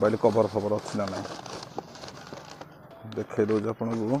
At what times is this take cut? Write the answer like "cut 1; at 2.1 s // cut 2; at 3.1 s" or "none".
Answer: cut 1; at 2.9 s